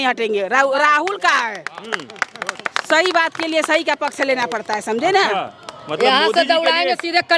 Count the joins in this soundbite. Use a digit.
0